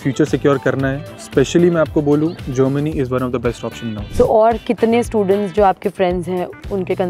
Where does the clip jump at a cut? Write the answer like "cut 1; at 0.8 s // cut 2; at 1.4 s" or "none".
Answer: cut 1; at 1.1 s // cut 2; at 4.1 s